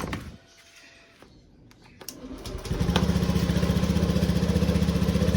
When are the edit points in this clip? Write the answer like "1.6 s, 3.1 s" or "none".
1.2 s